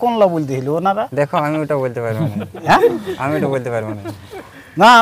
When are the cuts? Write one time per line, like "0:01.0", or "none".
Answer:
none